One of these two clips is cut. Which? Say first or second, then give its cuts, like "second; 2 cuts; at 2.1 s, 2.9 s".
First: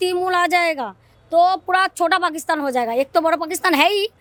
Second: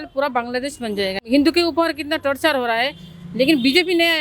second; 1 cut; at 1.3 s